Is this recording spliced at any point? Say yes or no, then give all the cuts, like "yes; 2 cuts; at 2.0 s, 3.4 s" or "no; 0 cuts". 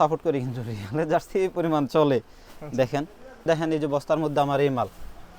yes; 1 cut; at 3.4 s